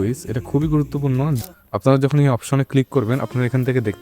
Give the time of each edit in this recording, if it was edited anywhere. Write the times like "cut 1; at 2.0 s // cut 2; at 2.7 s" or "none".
cut 1; at 1.4 s